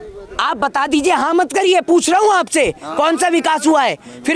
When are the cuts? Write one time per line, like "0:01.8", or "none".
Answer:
none